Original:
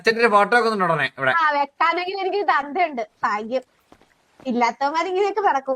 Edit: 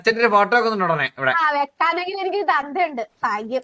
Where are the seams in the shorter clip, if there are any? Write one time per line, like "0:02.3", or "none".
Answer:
none